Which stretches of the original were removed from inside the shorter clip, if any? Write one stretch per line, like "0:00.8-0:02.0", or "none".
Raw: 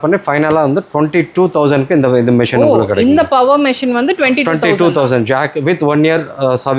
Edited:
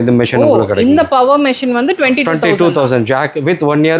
none